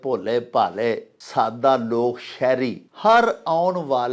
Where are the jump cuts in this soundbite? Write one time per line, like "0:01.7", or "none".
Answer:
0:01.1
0:02.8